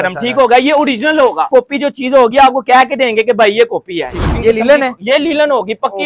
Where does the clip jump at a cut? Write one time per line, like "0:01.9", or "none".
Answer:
0:01.5
0:04.2